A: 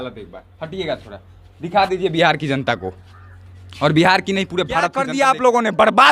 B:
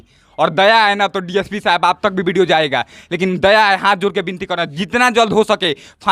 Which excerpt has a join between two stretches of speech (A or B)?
A